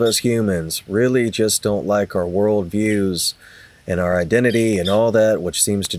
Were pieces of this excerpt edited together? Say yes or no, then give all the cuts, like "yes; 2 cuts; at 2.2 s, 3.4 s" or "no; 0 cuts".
no; 0 cuts